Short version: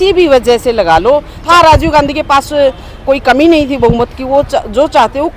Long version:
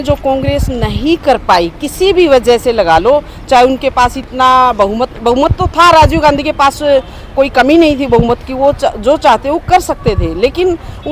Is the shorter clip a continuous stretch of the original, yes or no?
no